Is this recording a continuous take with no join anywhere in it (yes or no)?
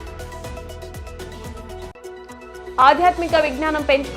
no